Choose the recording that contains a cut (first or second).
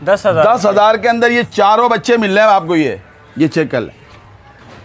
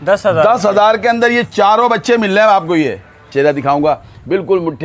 second